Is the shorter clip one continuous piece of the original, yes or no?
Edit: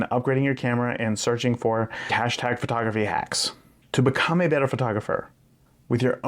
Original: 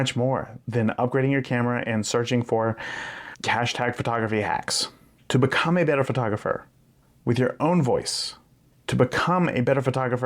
no